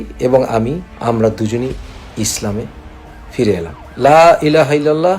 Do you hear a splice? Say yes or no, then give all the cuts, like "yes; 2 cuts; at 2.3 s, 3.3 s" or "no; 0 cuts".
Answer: yes; 2 cuts; at 0.9 s, 3.8 s